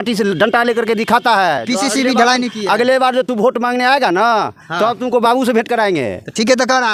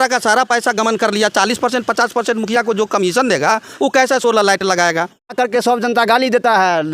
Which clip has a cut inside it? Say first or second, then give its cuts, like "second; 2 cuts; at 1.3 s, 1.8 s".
second; 1 cut; at 5.3 s